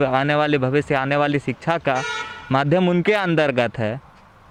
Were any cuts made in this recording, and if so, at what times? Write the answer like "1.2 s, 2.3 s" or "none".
none